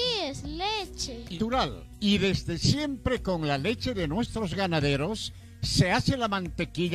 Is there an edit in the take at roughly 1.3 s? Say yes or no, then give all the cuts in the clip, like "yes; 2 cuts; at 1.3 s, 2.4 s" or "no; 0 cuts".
yes; 1 cut; at 1.3 s